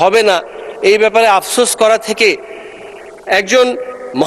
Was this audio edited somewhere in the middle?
no; 0 cuts

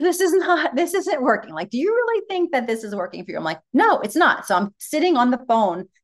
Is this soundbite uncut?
yes; 0 cuts

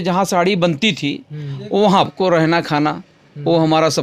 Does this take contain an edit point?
yes; 1 cut; at 2.1 s

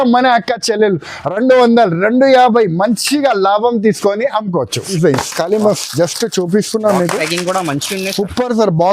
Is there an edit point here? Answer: yes; 1 cut; at 5.0 s

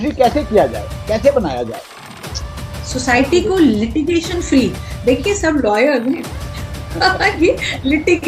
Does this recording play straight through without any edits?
yes; 0 cuts

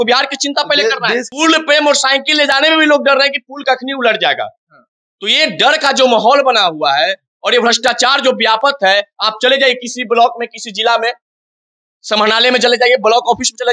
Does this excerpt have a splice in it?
yes; 1 cut; at 1.3 s

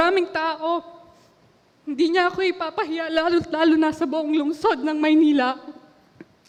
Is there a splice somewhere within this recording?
no; 0 cuts

